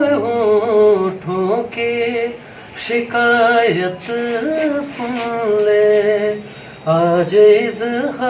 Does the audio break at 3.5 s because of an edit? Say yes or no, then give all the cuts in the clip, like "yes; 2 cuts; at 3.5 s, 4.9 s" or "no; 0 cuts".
no; 0 cuts